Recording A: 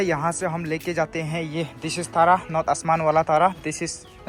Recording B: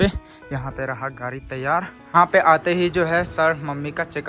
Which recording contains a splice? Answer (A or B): B